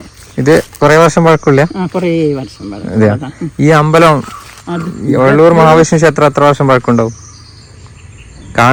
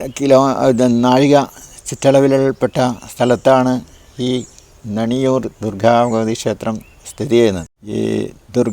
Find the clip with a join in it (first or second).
second